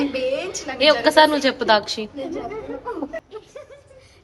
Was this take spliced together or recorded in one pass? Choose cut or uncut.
cut